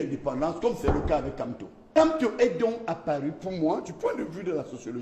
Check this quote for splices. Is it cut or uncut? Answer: cut